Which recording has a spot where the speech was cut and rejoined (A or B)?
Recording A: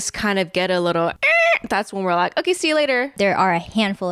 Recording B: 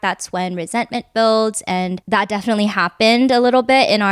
A